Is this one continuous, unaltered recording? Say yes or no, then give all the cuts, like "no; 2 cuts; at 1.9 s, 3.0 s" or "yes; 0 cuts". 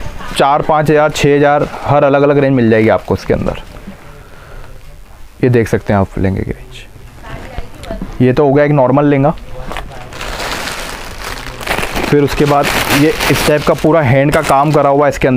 yes; 0 cuts